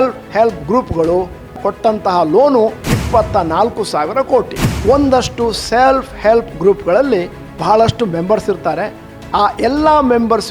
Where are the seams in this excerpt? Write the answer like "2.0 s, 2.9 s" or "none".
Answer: 1.6 s, 2.8 s, 4.6 s

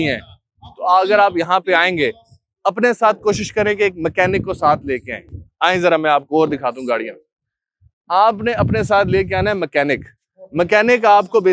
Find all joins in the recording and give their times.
none

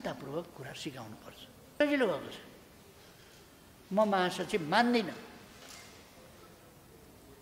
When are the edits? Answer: 1.8 s

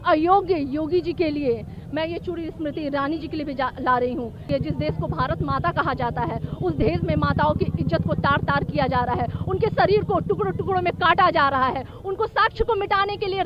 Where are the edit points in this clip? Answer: 1.8 s, 4.5 s

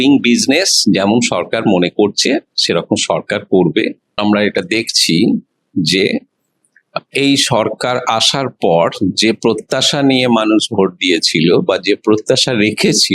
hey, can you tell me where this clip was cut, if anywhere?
4.2 s

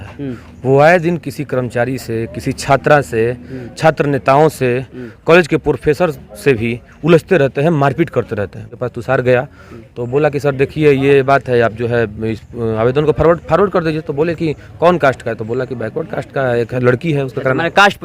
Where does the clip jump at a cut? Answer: 8.6 s

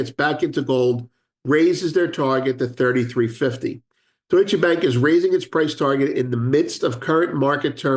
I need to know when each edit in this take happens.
none

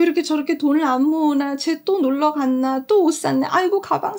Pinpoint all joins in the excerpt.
none

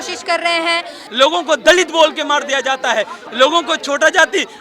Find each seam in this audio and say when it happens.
1.0 s, 3.2 s

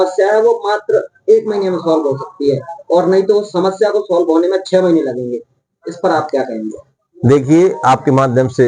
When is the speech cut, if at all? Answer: none

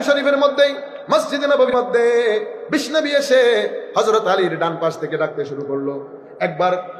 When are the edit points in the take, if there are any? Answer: 1.7 s

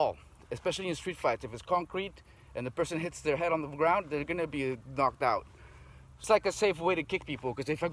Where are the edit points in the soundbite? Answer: 6.2 s

